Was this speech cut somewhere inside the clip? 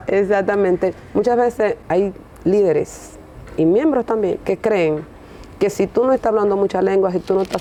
no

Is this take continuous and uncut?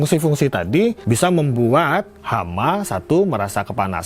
no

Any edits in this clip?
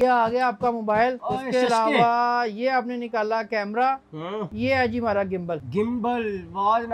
yes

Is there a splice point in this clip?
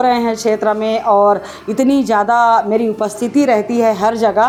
no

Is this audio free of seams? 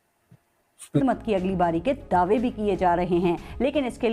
no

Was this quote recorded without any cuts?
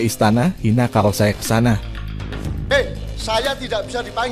no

